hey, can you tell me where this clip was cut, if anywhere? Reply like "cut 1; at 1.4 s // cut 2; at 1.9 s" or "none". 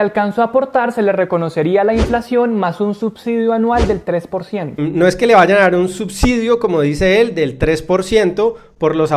none